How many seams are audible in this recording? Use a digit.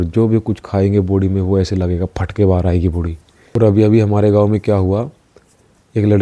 1